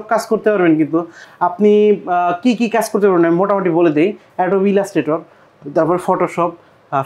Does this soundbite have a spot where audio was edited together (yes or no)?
no